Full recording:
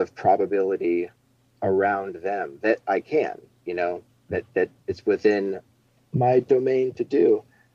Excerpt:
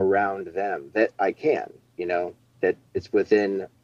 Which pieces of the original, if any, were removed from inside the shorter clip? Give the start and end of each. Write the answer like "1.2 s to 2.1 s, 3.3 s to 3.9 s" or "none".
4.2 s to 4.5 s

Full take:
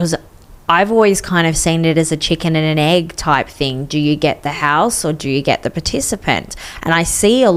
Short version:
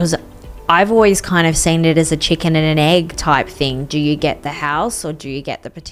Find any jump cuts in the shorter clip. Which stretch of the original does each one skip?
none

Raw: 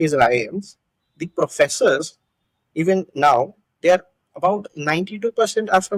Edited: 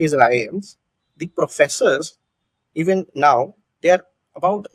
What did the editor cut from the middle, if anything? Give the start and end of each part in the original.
none

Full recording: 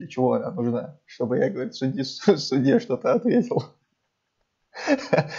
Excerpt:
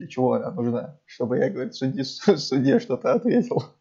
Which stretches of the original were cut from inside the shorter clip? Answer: none

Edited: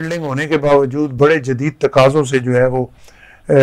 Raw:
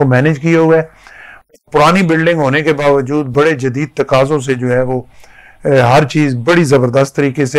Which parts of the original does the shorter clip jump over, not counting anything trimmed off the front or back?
none

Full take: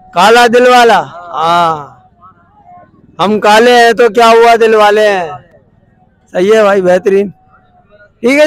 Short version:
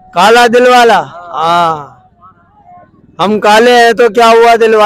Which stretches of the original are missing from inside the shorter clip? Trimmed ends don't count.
none

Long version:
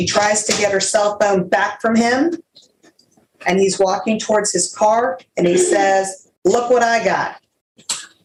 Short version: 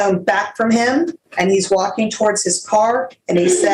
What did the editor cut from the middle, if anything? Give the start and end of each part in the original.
2.5 s to 3.3 s

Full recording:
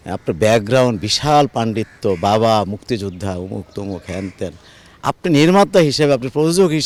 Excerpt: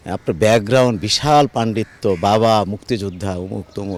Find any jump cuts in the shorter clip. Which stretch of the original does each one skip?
none

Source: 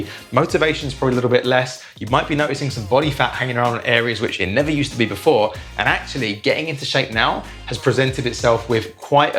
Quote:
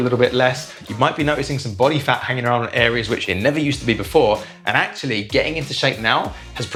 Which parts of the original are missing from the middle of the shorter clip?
none

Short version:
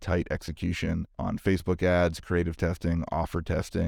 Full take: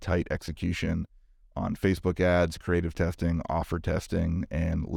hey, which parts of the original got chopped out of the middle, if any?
1.1 s to 1.5 s

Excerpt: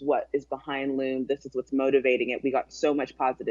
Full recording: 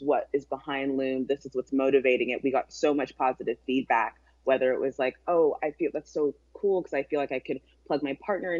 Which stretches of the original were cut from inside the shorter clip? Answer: none

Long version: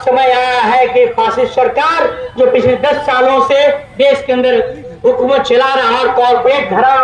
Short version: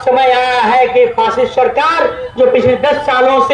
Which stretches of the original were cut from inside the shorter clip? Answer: none

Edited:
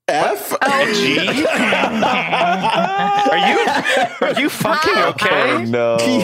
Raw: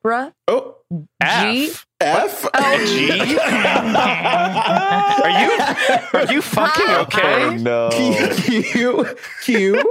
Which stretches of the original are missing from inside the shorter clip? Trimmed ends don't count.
none

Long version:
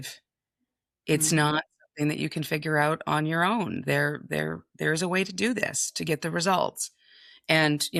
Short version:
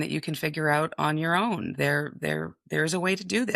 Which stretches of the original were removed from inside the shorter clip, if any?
none

